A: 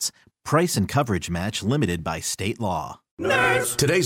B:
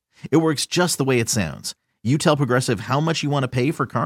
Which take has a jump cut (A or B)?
A